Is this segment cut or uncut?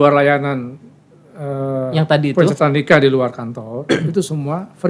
uncut